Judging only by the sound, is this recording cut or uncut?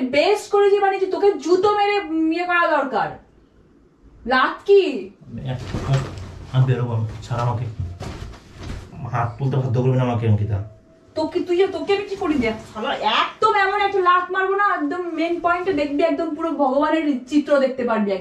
uncut